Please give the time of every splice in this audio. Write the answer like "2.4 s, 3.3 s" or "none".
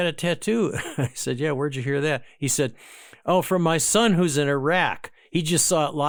none